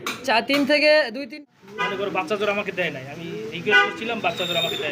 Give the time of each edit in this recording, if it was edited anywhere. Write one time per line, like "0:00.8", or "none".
0:01.4